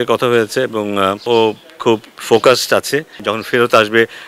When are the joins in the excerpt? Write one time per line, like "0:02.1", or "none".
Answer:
0:01.3
0:03.3